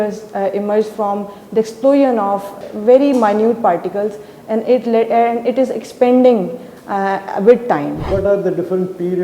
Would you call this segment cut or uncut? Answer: cut